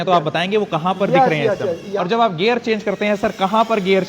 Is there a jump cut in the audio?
yes; 1 cut; at 1.9 s

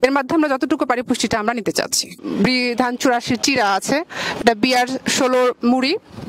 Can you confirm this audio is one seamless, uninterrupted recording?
no; 1 cut; at 2.2 s

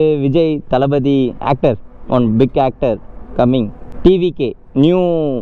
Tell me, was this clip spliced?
yes; 1 cut; at 3.8 s

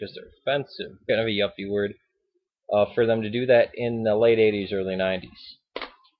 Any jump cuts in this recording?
no; 0 cuts

